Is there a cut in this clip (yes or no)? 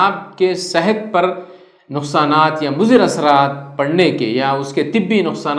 no